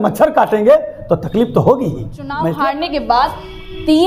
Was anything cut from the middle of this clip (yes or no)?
yes